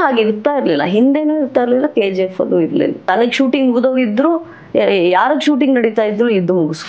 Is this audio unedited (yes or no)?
no